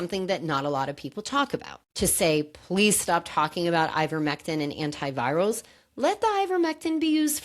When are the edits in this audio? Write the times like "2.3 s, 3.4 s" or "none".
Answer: 1.7 s